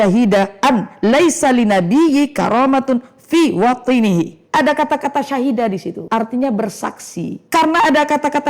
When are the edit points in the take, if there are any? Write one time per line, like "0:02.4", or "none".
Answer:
0:04.4
0:05.9
0:07.4